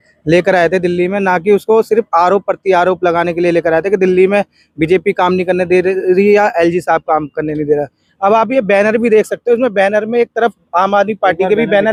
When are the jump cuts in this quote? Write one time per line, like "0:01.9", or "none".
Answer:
none